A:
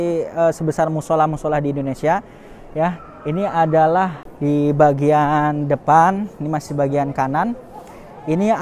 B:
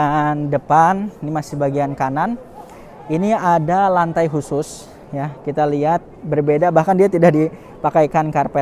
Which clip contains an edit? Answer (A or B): A